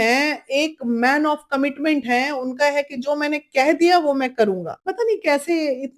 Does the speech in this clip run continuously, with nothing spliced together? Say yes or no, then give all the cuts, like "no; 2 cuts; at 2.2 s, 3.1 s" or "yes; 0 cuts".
no; 1 cut; at 4.8 s